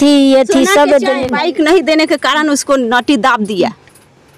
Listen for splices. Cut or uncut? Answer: cut